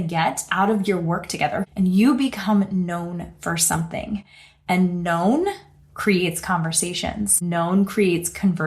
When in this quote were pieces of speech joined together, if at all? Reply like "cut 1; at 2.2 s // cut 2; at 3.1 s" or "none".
cut 1; at 1.7 s // cut 2; at 7.4 s